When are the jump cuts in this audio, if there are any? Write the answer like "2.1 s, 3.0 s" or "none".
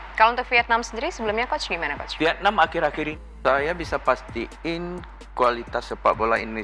3.1 s